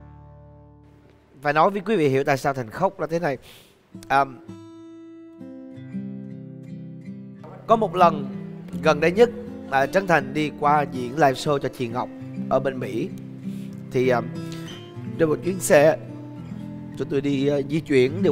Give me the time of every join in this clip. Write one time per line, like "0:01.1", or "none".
none